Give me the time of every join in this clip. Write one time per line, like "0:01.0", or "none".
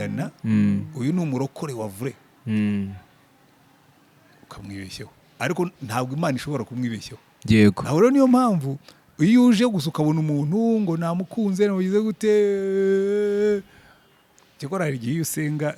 none